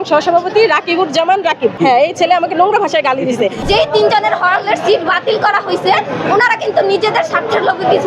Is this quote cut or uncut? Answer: cut